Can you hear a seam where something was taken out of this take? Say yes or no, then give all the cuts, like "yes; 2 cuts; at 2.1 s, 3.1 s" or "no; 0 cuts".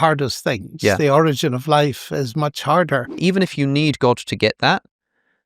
yes; 1 cut; at 3.2 s